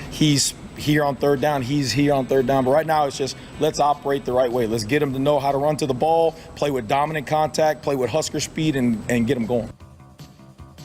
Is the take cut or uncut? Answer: cut